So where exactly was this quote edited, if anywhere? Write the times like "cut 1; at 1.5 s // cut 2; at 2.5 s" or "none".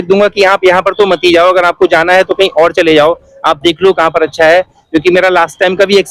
none